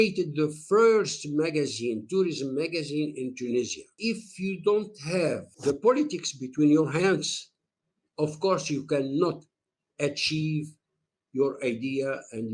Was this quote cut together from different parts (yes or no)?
yes